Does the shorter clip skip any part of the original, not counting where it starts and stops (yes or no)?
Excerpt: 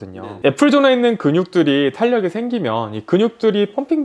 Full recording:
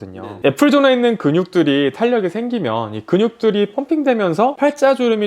no